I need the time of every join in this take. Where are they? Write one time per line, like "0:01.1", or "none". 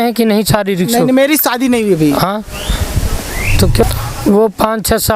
0:03.8